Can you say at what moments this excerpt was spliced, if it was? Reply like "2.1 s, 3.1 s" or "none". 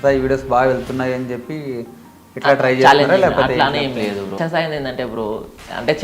4.4 s